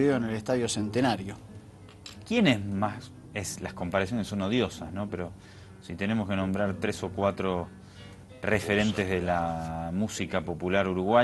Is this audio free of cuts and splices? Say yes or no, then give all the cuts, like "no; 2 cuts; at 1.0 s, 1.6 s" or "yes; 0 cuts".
no; 1 cut; at 7.7 s